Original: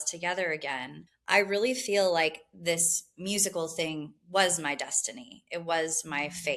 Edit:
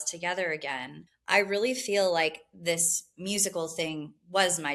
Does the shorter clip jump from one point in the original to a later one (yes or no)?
no